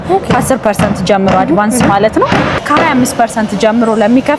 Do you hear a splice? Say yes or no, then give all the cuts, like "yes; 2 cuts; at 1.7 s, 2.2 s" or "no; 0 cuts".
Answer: yes; 1 cut; at 2.6 s